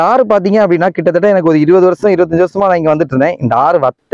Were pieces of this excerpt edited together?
no; 0 cuts

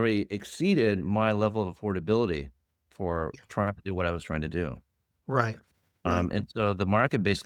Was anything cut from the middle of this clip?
no; 0 cuts

